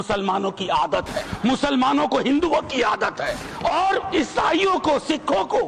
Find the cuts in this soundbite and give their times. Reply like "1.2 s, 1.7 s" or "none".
1.2 s, 3.4 s